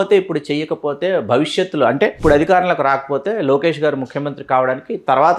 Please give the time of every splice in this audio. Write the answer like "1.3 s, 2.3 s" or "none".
2.2 s